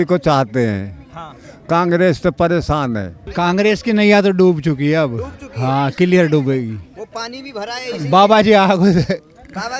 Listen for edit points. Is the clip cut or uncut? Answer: cut